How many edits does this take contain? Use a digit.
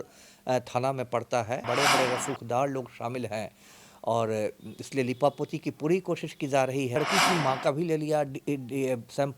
2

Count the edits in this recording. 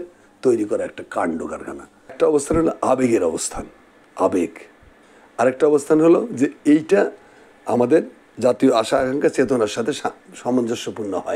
1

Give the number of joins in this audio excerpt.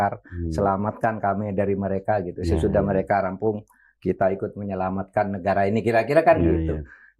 0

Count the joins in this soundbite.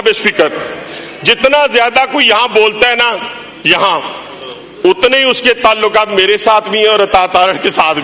0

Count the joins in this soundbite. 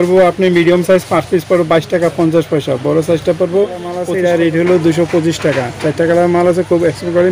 1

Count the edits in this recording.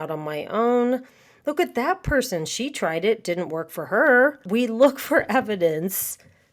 1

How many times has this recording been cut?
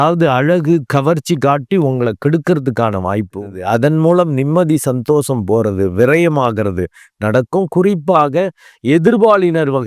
1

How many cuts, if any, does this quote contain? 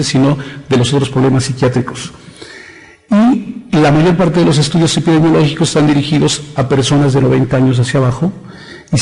1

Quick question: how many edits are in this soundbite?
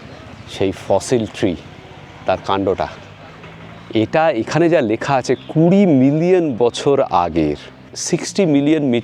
1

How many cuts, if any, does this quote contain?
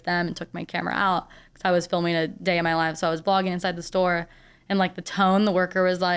0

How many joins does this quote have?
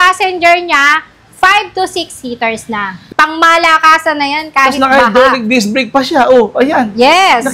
1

